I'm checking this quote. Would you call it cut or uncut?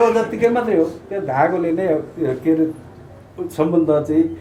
uncut